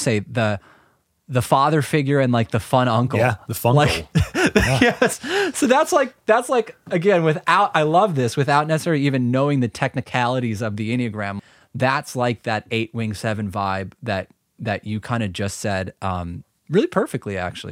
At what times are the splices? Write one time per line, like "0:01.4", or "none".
0:11.4